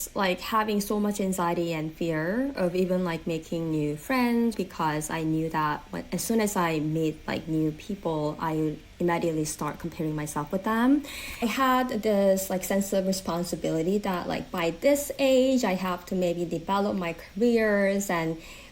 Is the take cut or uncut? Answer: cut